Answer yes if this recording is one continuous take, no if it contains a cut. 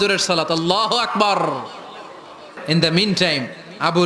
no